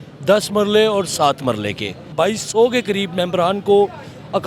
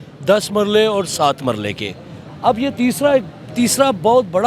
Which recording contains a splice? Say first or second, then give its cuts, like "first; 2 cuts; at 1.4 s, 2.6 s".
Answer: first; 1 cut; at 2.1 s